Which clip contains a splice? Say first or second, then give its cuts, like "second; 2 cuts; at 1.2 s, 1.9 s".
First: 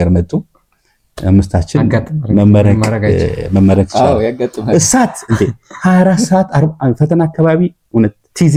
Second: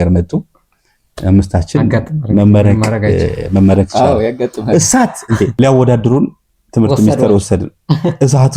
second; 1 cut; at 5.5 s